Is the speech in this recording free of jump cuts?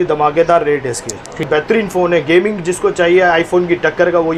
no; 1 cut; at 1.5 s

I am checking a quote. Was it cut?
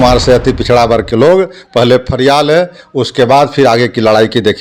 no; 0 cuts

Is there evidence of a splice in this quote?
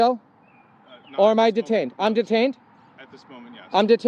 no; 0 cuts

